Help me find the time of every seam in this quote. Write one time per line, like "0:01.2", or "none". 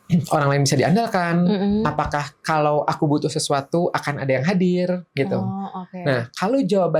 none